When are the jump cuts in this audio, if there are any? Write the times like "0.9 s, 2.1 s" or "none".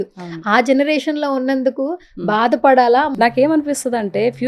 3.1 s